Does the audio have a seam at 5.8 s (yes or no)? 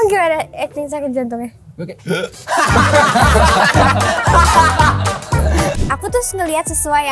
yes